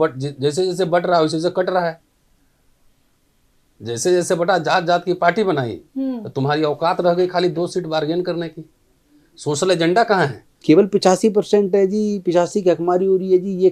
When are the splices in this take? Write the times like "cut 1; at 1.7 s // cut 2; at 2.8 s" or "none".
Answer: cut 1; at 10.5 s